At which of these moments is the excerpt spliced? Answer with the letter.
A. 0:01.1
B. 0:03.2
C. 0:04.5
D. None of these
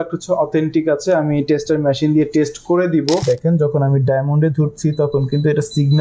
B